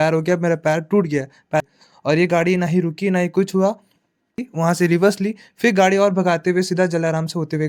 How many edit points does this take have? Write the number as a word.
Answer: two